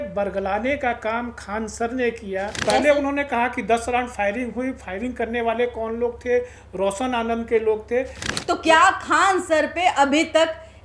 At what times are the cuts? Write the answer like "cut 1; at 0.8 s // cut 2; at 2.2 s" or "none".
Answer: cut 1; at 2.5 s // cut 2; at 8.3 s